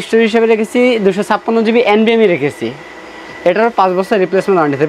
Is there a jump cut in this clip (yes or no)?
no